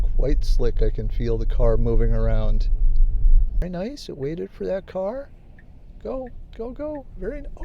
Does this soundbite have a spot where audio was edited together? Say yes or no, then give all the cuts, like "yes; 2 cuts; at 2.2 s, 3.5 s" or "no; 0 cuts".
yes; 1 cut; at 3.6 s